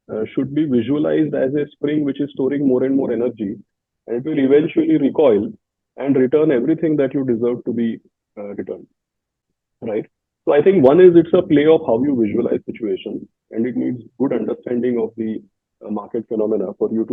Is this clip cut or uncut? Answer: uncut